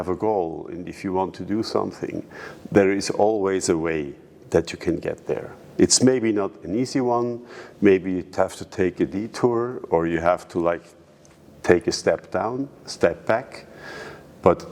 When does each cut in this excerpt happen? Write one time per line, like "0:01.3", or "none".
none

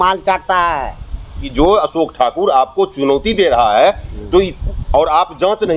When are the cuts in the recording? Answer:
0:01.4

